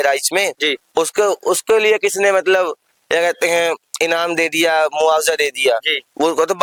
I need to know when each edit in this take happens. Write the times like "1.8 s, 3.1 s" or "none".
none